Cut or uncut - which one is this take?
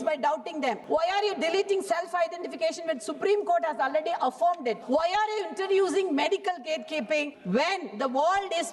cut